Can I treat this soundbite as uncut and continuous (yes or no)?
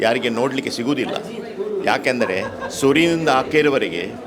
yes